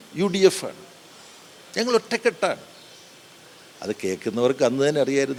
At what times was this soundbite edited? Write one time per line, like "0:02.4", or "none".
none